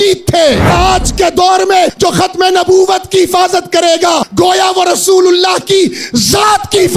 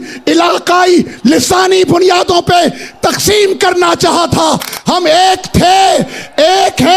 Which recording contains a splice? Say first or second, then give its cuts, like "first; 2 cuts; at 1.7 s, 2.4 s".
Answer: first; 3 cuts; at 0.7 s, 1.9 s, 4.3 s